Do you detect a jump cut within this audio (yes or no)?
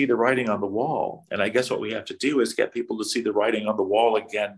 no